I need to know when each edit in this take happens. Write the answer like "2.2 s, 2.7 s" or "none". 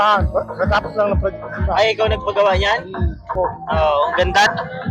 none